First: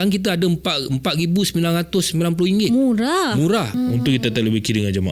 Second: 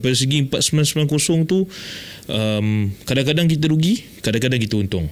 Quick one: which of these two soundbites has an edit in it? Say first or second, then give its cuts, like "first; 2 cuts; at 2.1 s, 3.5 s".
first; 1 cut; at 3.7 s